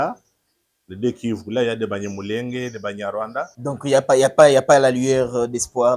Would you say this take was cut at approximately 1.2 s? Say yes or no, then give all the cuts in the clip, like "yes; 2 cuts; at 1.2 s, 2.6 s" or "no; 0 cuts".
no; 1 cut; at 3.5 s